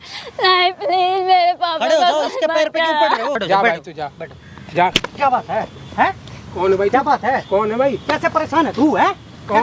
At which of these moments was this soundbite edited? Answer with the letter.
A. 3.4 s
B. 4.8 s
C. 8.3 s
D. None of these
A